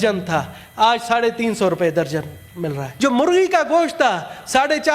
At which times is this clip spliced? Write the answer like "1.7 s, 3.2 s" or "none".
2.8 s

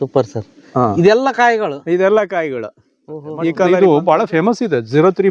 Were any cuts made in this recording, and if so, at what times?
3.7 s

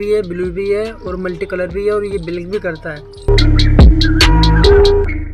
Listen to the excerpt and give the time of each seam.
none

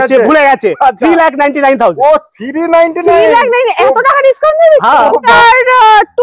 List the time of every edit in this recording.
5.3 s

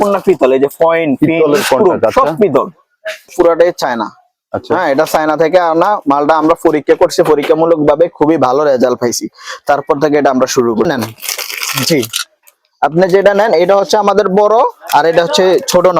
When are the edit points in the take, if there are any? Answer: 3.3 s, 10.9 s

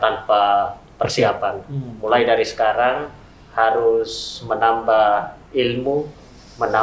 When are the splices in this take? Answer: none

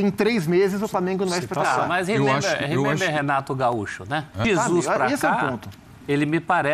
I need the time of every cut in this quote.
4.4 s

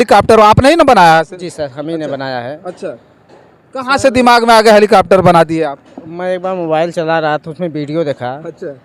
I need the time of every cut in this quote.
none

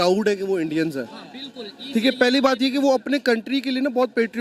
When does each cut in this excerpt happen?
none

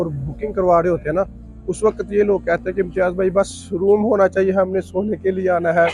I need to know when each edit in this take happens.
none

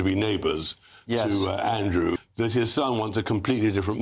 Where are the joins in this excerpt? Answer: 2.2 s

